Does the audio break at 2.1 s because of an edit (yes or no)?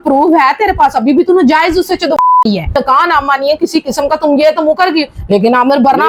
no